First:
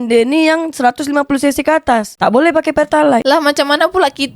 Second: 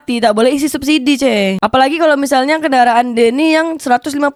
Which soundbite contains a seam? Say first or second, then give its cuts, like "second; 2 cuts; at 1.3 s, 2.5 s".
first; 1 cut; at 3.2 s